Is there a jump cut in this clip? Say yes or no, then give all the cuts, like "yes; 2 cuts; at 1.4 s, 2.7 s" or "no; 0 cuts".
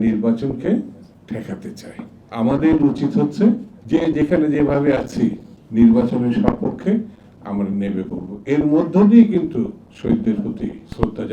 no; 0 cuts